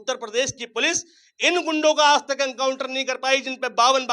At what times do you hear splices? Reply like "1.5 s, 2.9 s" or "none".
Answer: none